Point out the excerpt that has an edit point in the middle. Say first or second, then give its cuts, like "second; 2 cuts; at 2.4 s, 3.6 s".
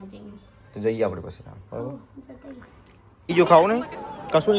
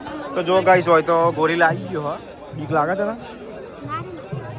first; 1 cut; at 3.2 s